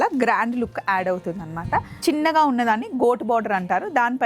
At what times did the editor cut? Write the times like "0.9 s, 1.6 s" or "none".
1.9 s